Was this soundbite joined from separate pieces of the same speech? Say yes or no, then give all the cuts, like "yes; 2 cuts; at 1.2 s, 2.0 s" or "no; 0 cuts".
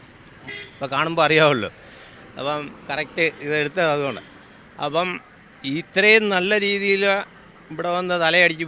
no; 0 cuts